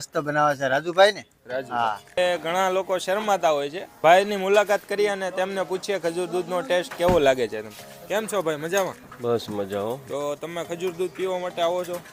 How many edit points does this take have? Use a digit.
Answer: 0